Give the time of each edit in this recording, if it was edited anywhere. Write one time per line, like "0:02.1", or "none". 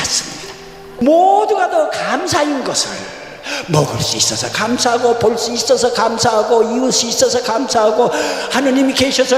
0:01.0